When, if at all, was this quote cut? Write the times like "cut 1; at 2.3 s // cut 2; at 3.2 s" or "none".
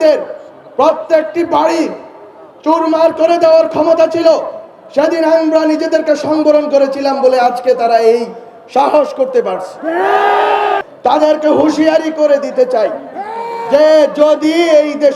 cut 1; at 10.9 s